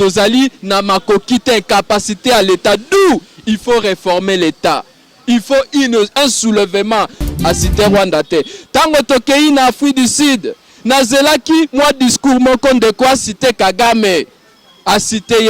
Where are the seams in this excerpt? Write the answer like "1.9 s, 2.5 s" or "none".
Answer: 7.4 s